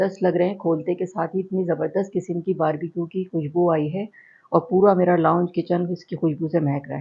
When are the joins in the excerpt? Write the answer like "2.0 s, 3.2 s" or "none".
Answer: none